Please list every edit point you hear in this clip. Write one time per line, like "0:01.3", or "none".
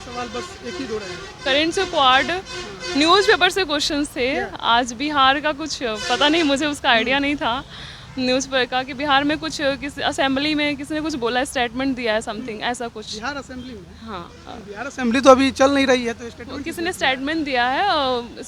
none